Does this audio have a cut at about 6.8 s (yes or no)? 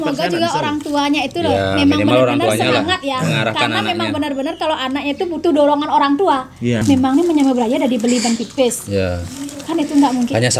yes